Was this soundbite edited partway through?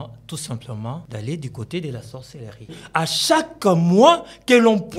yes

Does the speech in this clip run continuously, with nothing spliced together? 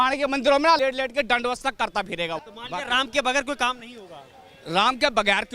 no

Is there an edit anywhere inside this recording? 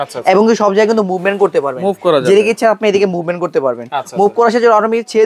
no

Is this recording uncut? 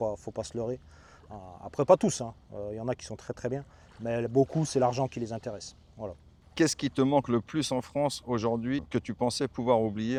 yes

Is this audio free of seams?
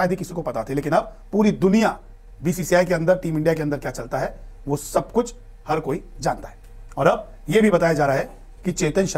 yes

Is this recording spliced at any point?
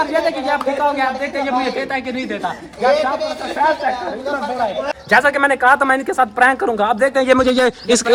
no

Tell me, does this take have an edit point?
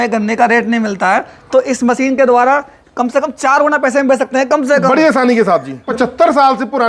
yes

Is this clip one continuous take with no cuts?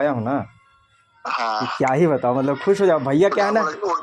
yes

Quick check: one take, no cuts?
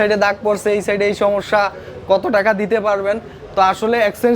yes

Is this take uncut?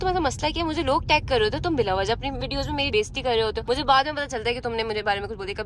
no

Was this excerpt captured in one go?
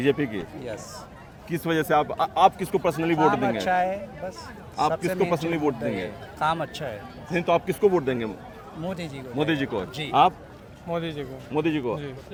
yes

